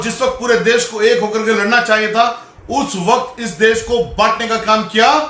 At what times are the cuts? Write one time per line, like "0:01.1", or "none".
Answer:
none